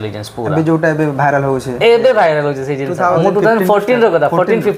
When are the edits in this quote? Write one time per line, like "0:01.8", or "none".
0:03.2